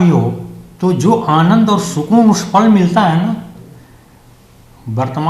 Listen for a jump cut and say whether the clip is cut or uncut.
uncut